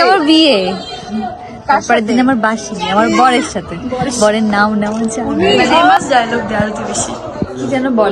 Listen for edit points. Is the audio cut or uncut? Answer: cut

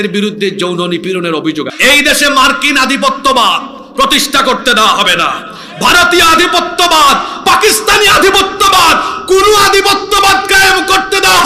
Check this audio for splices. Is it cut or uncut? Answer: cut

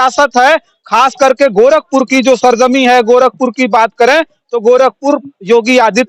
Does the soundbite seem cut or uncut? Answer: uncut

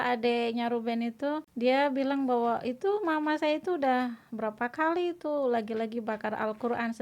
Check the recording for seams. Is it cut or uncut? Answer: cut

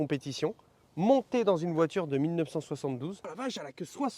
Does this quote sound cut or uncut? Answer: cut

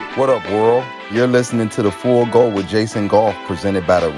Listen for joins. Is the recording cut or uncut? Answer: cut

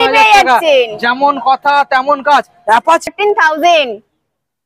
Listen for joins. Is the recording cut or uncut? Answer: cut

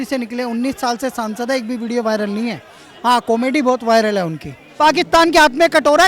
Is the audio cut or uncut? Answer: cut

